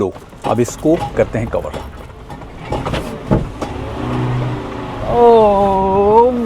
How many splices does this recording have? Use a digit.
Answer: 1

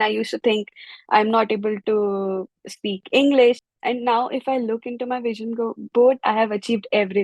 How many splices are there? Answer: 1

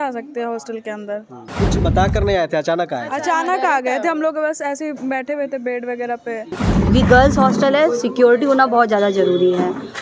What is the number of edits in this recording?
2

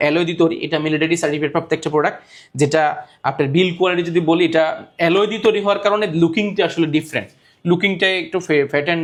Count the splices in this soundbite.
0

